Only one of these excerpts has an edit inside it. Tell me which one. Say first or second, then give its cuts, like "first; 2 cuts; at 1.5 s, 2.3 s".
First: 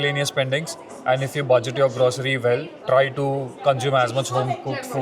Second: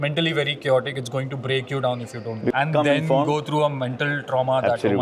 second; 1 cut; at 2.5 s